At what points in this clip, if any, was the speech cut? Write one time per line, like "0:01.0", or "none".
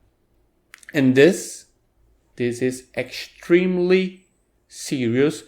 0:02.2